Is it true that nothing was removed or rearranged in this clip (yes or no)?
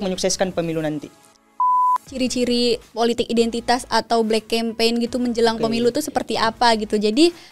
no